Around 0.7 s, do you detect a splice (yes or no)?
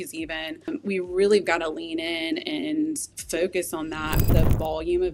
yes